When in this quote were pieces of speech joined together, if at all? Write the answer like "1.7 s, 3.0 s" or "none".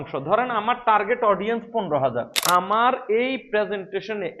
2.3 s